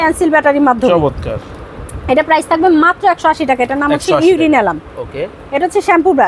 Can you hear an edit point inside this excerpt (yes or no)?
no